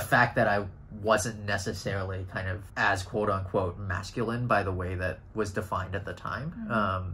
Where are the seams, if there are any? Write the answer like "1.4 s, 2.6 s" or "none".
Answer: none